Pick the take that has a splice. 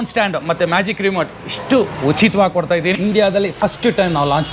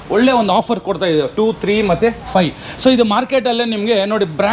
first; 1 cut; at 3.0 s

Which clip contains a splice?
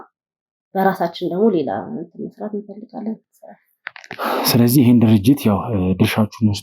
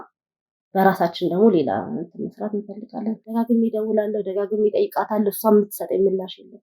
second; 1 cut; at 3.2 s

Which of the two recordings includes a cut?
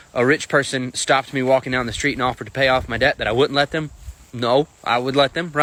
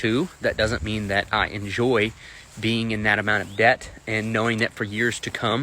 second; 1 cut; at 3.9 s

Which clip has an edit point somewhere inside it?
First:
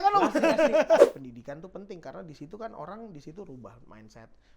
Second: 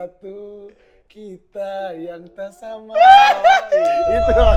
first; 1 cut; at 1.0 s

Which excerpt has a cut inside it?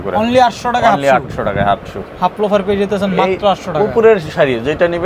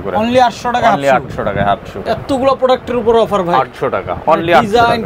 second; 1 cut; at 2.0 s

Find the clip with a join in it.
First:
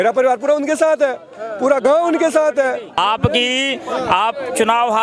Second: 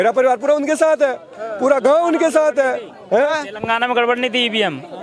first; 1 cut; at 3.0 s

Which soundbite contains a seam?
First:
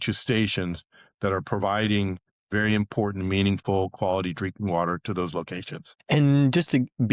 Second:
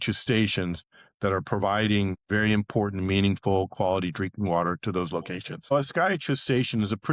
second; 2 cuts; at 2.2 s, 5.7 s

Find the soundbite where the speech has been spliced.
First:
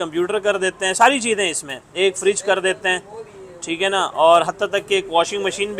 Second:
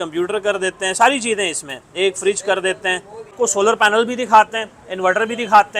second; 1 cut; at 3.3 s

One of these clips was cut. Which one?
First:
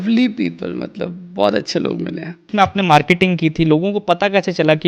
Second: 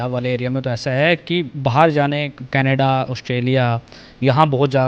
first; 1 cut; at 2.5 s

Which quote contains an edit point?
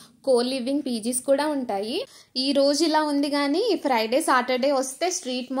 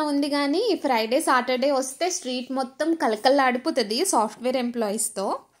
first; 1 cut; at 2.1 s

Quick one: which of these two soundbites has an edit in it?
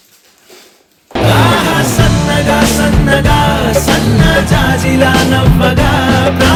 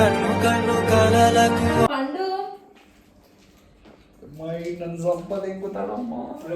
second; 1 cut; at 1.9 s

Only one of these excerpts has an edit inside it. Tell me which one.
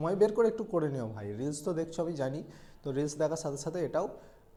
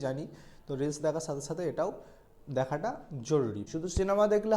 second; 1 cut; at 3.6 s

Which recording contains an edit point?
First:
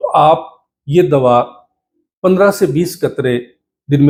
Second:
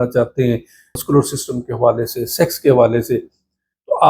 second; 1 cut; at 1.0 s

